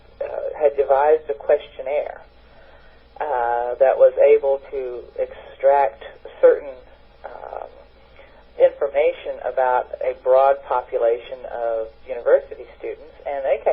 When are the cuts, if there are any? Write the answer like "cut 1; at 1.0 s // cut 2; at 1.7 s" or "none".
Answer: cut 1; at 9.5 s